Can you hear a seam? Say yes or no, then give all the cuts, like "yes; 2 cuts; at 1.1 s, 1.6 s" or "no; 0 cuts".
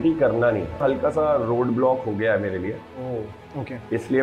yes; 2 cuts; at 0.8 s, 3.3 s